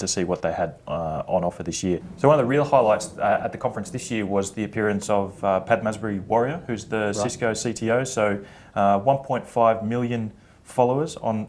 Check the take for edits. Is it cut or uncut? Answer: uncut